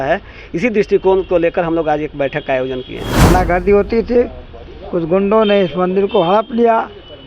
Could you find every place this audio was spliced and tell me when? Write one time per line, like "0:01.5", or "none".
0:03.3